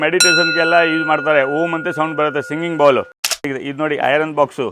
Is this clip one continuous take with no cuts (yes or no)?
no